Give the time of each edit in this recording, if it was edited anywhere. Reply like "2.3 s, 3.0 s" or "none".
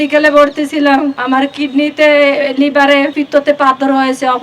1.2 s, 3.2 s